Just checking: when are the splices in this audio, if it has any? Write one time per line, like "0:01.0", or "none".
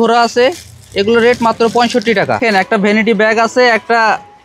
0:02.4